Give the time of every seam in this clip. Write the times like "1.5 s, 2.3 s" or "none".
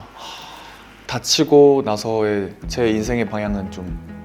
1.0 s